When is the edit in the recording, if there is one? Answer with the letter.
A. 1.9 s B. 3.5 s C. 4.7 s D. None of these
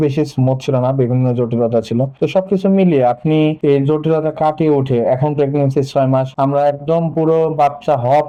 D